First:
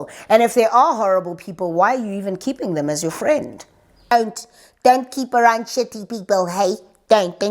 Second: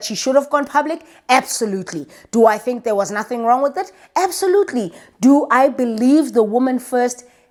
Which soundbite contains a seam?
first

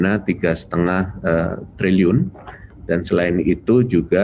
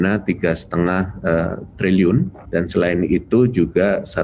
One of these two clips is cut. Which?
second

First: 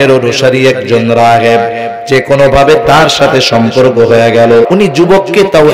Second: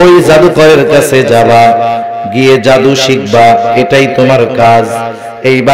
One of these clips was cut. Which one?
first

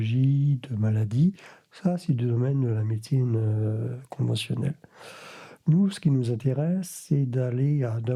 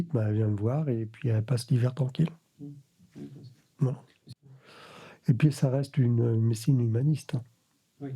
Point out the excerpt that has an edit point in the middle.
second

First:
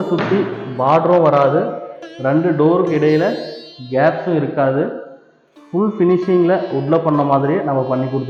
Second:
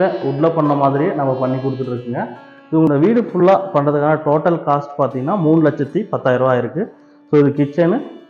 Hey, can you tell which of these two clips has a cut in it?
second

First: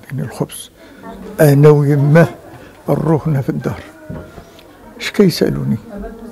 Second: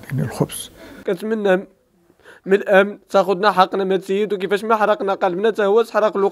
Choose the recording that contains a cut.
second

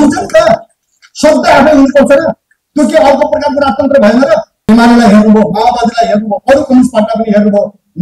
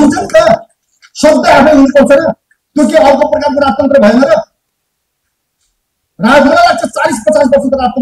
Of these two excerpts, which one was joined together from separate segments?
first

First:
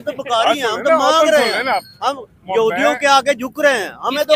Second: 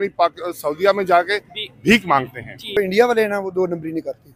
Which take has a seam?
second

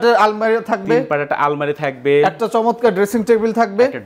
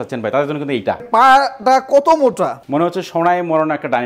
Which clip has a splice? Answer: second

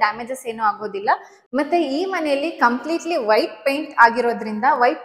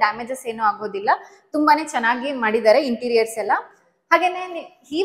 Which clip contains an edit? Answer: first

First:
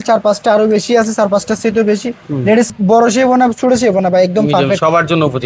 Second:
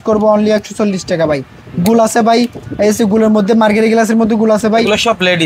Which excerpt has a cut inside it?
first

